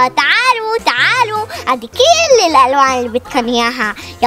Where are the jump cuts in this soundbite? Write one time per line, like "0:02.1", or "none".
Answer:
none